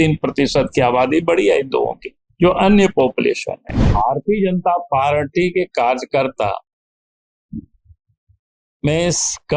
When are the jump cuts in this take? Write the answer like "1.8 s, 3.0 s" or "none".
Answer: 3.9 s